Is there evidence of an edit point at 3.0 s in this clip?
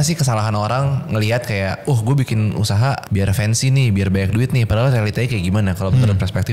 yes; 1 cut; at 3.0 s

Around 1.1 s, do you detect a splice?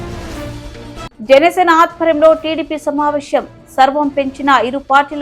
yes; 1 cut; at 1.1 s

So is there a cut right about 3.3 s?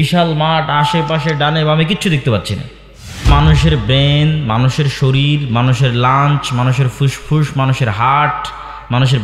yes; 1 cut; at 3.3 s

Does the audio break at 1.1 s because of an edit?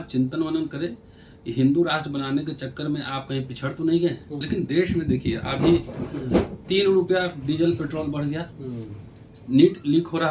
no; 1 cut; at 4.3 s

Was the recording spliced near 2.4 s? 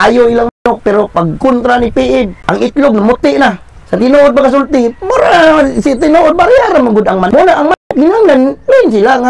yes; 2 cuts; at 2.4 s, 7.7 s

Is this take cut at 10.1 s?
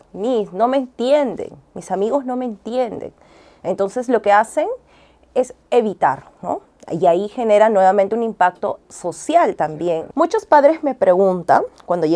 yes; 1 cut; at 10.1 s

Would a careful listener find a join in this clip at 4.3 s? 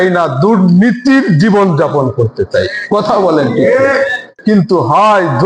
yes; 1 cut; at 4.3 s

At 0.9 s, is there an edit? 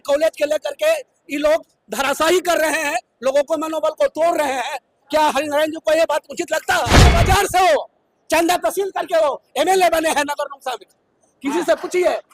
no; 1 cut; at 7.1 s

